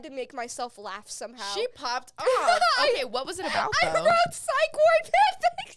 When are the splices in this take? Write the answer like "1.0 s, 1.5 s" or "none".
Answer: none